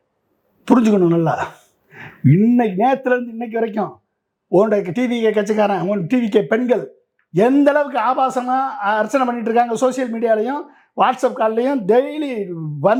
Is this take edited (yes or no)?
no